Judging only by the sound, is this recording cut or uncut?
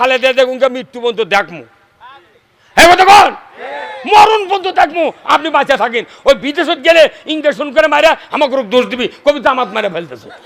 uncut